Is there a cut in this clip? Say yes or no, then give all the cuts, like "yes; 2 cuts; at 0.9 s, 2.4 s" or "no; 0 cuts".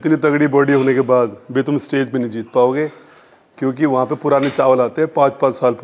no; 0 cuts